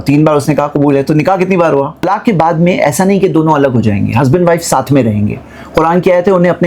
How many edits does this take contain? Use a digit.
1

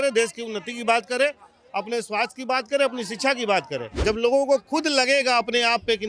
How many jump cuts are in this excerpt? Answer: 1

